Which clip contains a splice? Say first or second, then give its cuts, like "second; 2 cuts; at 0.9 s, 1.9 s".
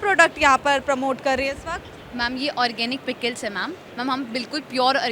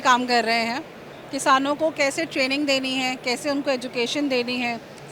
first; 1 cut; at 3.9 s